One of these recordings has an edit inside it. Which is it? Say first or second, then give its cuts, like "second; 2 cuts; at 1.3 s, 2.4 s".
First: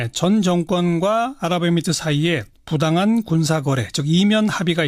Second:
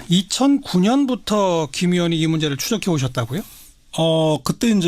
second; 1 cut; at 2.6 s